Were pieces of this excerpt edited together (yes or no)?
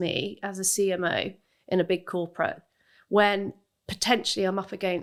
no